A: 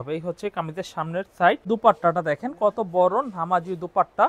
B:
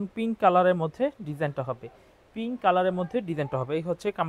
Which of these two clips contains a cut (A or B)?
A